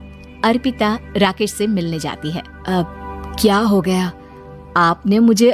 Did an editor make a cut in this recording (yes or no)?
yes